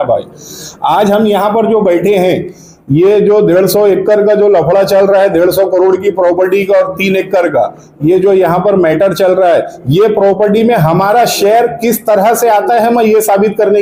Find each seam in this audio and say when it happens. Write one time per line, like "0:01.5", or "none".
none